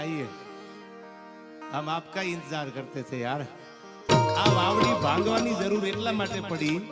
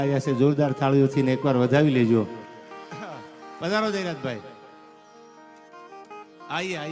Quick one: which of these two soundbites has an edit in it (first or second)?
first